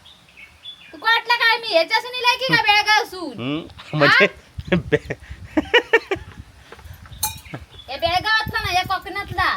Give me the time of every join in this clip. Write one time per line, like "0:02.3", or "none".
none